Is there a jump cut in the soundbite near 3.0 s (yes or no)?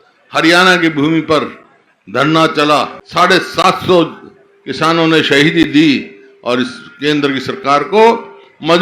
yes